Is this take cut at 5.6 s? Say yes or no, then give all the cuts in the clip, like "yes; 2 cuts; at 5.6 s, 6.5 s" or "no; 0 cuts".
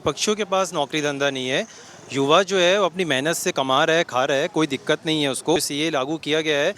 yes; 1 cut; at 5.6 s